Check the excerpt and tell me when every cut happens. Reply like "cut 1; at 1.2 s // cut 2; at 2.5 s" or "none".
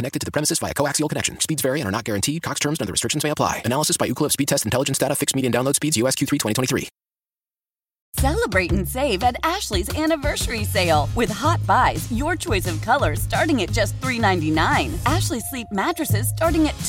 none